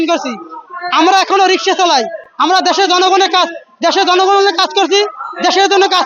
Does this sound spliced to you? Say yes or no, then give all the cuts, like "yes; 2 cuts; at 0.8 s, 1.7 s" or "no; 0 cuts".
no; 0 cuts